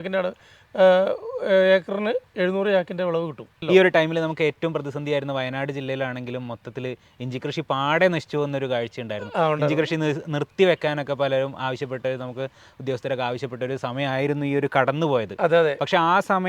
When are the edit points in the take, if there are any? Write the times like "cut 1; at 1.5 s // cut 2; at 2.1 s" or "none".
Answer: cut 1; at 3.6 s